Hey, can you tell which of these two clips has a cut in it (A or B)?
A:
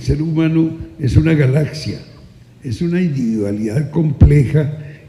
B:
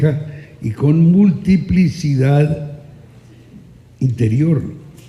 B